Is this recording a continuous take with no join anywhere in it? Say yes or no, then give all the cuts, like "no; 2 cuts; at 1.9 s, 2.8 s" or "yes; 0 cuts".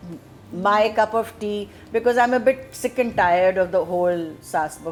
yes; 0 cuts